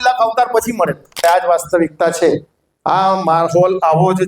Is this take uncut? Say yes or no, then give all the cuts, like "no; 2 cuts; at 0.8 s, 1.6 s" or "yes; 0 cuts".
no; 1 cut; at 1.2 s